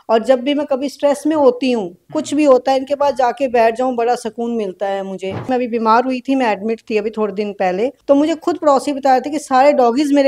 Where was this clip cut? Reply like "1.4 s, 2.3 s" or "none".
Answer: 5.5 s, 8.0 s

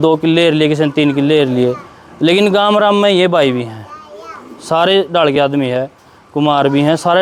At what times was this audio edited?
none

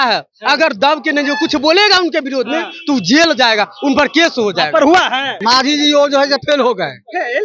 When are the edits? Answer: 5.3 s

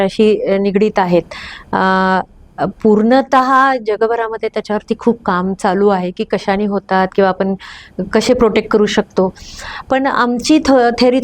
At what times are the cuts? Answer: none

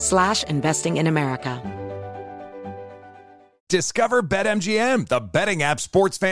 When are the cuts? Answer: 1.6 s

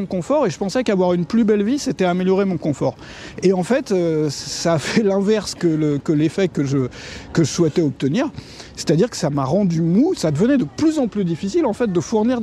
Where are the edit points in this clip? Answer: 10.2 s

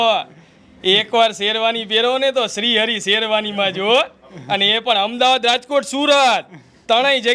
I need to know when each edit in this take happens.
none

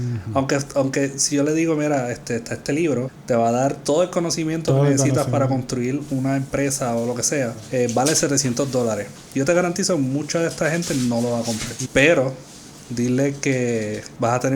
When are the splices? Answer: 3.1 s, 7.6 s, 9.2 s, 11.7 s

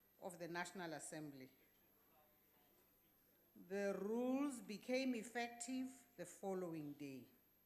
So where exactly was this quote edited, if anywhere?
4.6 s

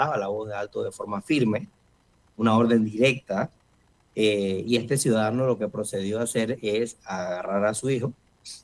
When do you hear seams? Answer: none

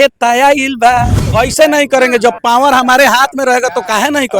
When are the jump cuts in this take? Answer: 1.2 s

